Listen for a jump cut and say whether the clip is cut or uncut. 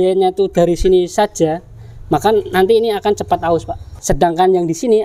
cut